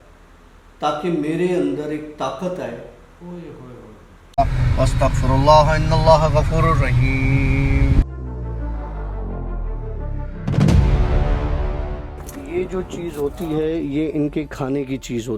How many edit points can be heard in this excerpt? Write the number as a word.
one